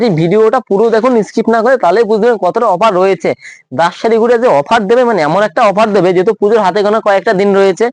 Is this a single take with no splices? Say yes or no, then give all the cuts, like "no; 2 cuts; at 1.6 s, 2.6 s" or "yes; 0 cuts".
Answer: yes; 0 cuts